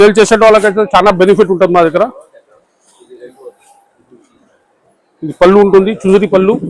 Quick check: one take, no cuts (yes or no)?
yes